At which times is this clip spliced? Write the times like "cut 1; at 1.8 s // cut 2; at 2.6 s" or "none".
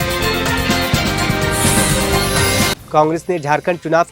cut 1; at 2.8 s